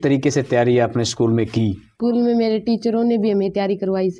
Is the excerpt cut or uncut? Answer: cut